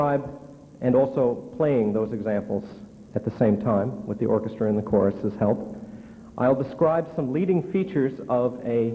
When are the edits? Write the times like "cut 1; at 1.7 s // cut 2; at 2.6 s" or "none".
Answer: none